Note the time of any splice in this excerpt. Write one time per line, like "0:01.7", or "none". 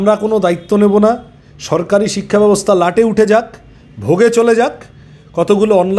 none